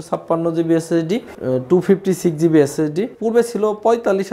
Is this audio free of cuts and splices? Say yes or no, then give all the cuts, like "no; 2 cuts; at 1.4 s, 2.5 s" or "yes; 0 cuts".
no; 2 cuts; at 1.3 s, 3.2 s